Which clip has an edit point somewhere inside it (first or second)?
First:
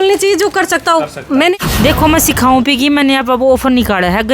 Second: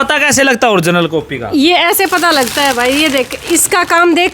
first